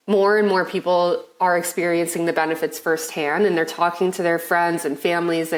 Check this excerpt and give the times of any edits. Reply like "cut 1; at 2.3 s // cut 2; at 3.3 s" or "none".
none